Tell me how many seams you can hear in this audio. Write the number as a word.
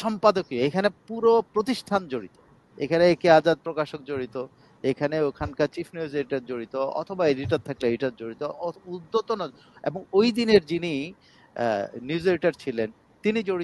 zero